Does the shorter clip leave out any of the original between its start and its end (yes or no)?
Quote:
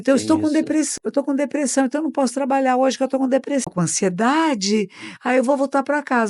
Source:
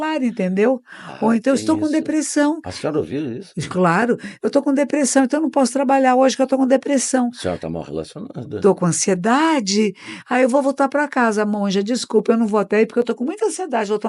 yes